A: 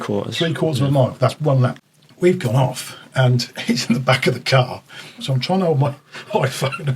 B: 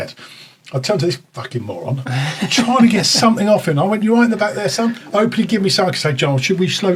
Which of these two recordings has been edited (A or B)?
A